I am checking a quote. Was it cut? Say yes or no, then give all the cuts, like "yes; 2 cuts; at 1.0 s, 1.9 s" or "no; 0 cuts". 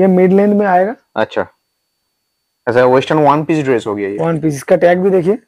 no; 0 cuts